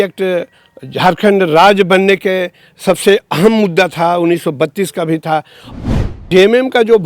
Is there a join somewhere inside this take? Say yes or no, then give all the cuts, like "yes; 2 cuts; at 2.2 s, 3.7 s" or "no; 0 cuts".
yes; 1 cut; at 5.8 s